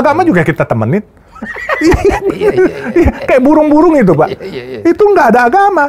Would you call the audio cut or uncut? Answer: uncut